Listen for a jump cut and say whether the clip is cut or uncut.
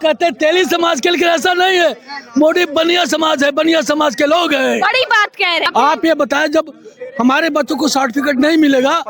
cut